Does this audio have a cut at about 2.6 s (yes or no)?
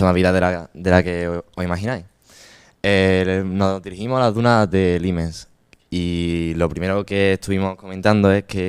no